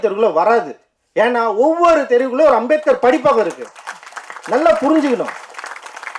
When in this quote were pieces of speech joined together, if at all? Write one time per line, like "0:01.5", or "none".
none